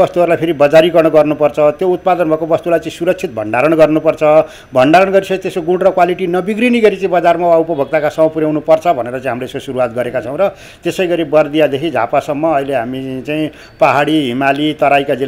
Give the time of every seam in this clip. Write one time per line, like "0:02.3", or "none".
none